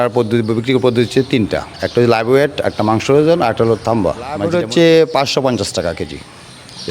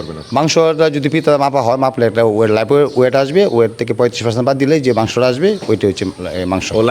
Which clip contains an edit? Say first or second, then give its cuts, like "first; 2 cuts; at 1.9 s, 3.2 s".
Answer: first; 1 cut; at 4.4 s